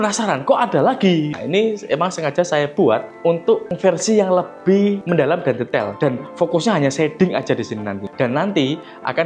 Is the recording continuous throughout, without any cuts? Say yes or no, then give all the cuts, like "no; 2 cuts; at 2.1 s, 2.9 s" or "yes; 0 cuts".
no; 4 cuts; at 1.4 s, 3.1 s, 5.9 s, 8.0 s